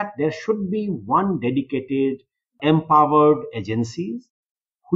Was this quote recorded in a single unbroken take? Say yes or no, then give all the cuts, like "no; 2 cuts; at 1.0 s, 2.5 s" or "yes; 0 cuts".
no; 1 cut; at 2.5 s